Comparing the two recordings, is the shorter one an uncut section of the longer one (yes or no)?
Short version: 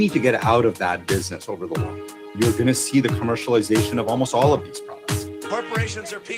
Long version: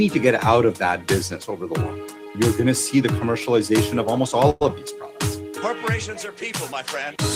no